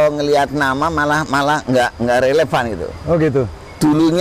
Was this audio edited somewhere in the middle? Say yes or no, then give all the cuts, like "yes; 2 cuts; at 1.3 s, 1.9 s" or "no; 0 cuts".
no; 0 cuts